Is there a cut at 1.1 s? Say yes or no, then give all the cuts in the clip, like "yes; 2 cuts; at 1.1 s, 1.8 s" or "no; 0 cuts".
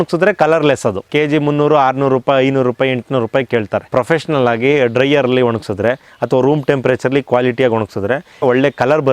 yes; 3 cuts; at 1.1 s, 3.9 s, 8.4 s